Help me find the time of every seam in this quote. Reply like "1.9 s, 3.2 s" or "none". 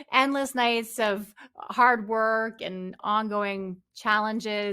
3.0 s